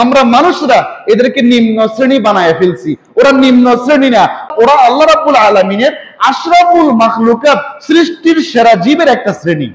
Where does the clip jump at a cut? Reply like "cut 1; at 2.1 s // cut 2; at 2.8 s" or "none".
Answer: none